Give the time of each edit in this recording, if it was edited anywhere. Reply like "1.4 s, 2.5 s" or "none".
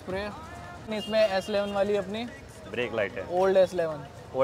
0.9 s